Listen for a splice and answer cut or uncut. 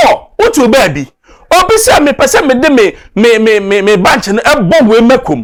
uncut